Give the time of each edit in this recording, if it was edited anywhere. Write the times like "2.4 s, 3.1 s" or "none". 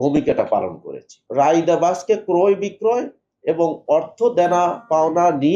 1.2 s